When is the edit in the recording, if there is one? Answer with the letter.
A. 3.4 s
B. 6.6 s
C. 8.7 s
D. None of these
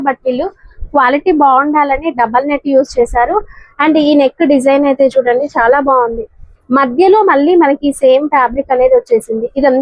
D